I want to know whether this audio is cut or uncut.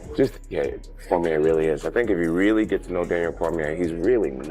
uncut